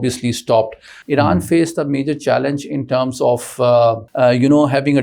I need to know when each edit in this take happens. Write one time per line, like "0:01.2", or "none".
0:00.9
0:04.1